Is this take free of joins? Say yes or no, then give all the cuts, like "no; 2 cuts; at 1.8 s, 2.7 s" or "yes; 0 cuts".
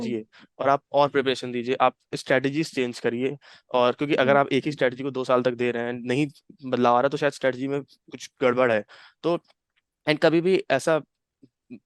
yes; 0 cuts